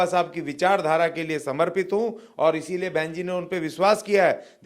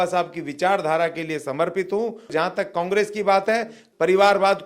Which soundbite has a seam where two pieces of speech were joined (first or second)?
second